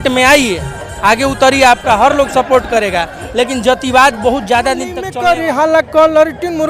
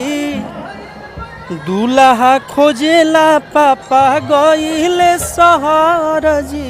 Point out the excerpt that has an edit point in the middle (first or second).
first